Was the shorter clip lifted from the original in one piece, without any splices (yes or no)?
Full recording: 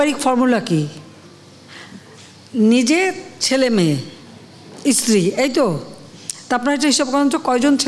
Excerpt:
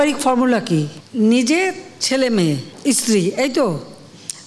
no